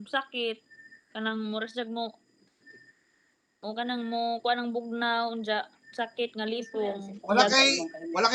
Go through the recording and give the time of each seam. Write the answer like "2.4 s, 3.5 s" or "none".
none